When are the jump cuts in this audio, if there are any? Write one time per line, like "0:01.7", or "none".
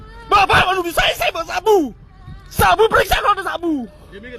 none